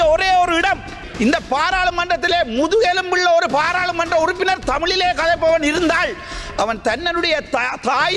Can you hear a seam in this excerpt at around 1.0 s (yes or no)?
yes